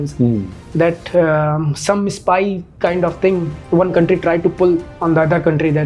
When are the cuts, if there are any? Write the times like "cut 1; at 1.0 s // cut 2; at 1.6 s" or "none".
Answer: cut 1; at 3.6 s // cut 2; at 4.9 s